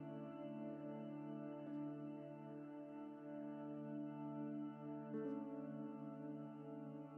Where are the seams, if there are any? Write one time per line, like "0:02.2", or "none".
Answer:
none